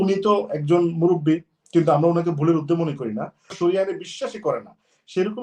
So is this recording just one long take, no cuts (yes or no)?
no